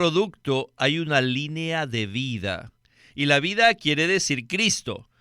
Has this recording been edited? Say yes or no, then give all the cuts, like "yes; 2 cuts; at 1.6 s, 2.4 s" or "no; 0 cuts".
yes; 1 cut; at 3.8 s